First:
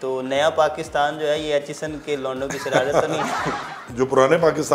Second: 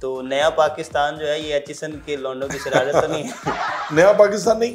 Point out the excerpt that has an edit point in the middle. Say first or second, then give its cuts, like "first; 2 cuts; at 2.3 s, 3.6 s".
first; 1 cut; at 3.8 s